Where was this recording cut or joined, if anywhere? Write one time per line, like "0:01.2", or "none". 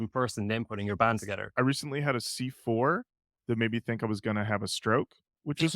0:01.5